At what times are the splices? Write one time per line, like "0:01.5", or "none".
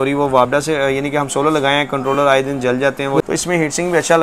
0:03.2